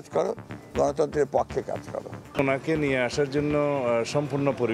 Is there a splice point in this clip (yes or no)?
yes